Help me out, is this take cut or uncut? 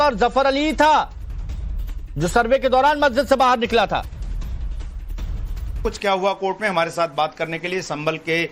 cut